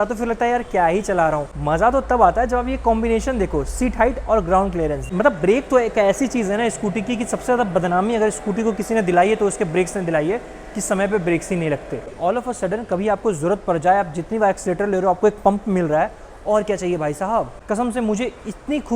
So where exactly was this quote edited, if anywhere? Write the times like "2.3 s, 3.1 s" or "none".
1.5 s, 5.0 s, 12.1 s, 17.5 s